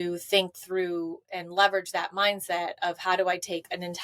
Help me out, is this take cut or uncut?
uncut